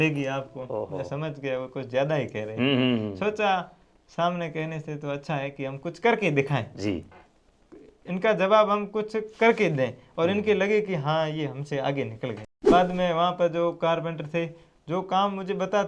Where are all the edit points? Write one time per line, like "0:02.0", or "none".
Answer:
0:12.7

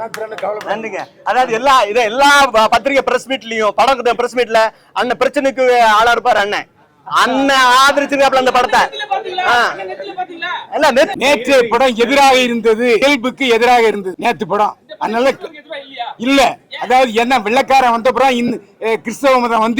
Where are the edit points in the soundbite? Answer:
0:11.1
0:13.0
0:14.1

